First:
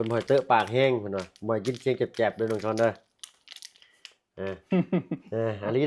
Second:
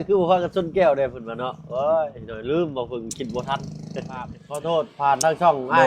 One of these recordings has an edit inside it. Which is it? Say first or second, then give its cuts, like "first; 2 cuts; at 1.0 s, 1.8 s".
second; 1 cut; at 4.4 s